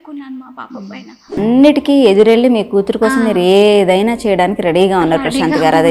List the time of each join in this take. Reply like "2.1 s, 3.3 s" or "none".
1.4 s